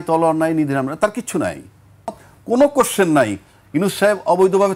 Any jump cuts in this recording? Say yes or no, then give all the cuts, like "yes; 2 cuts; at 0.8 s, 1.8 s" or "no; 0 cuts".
yes; 1 cut; at 2.3 s